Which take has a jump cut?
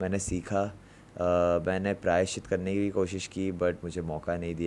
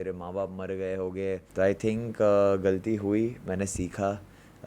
second; 1 cut; at 1.5 s

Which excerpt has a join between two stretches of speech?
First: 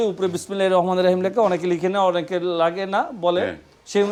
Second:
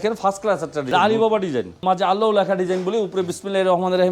second; 2 cuts; at 0.8 s, 1.8 s

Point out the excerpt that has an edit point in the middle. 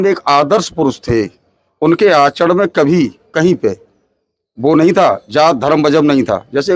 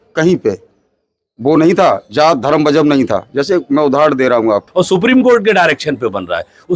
second; 1 cut; at 4.7 s

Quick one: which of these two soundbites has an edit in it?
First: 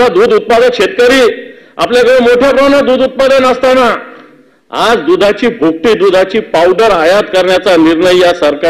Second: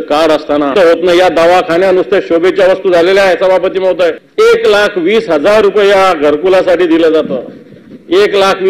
second; 2 cuts; at 0.7 s, 4.2 s

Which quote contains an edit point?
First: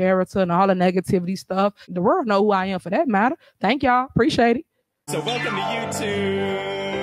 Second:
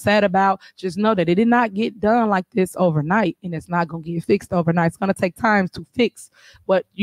first; 1 cut; at 1.9 s

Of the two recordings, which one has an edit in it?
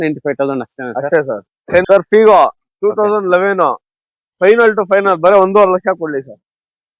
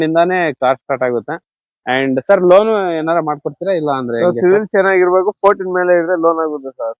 first; 1 cut; at 1.8 s

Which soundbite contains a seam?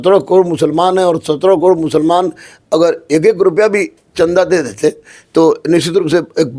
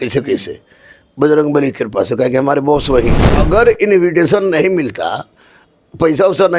second; 1 cut; at 3.3 s

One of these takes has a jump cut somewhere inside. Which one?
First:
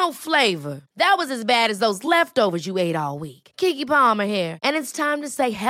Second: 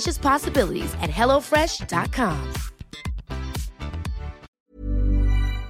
second; 1 cut; at 4.5 s

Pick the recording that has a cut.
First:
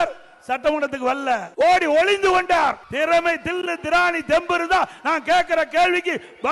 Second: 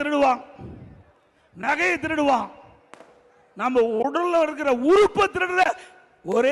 first; 2 cuts; at 1.5 s, 2.8 s

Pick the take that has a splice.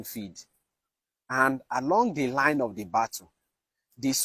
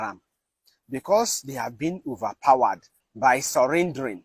second; 1 cut; at 3.0 s

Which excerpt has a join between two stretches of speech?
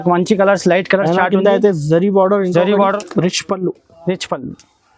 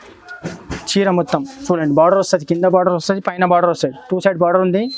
first; 1 cut; at 3.0 s

